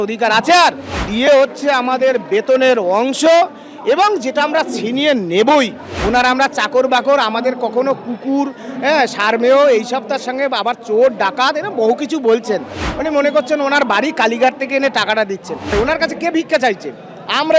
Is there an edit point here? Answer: yes; 3 cuts; at 1.0 s, 5.9 s, 15.7 s

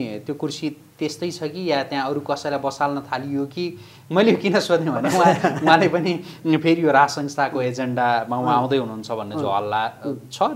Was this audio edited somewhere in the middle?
no; 0 cuts

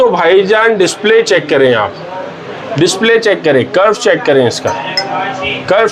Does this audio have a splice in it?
no; 0 cuts

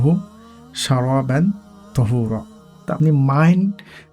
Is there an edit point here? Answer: yes; 1 cut; at 2.9 s

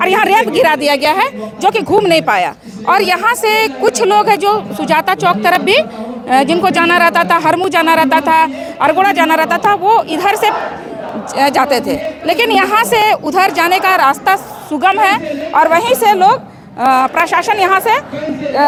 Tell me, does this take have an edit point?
no; 0 cuts

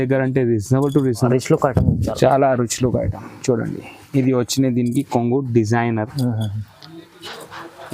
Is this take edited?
yes; 1 cut; at 1.3 s

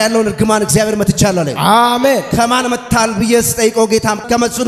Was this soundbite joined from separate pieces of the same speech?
no; 0 cuts

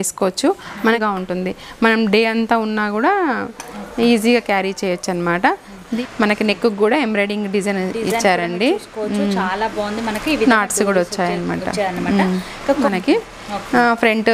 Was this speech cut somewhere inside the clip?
yes; 3 cuts; at 1.0 s, 5.9 s, 12.8 s

